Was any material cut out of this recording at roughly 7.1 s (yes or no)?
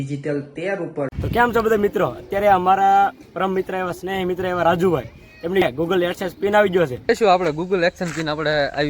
yes